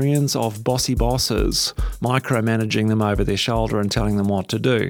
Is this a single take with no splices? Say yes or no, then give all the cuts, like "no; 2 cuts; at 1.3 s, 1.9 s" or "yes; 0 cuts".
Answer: yes; 0 cuts